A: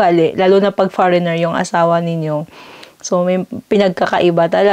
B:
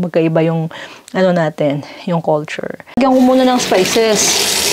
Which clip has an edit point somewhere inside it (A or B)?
B